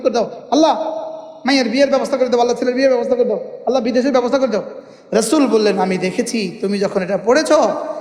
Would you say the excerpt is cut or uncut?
cut